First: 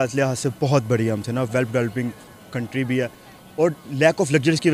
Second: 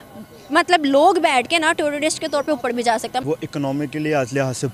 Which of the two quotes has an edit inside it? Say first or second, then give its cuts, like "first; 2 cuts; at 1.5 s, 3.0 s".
second; 1 cut; at 3.2 s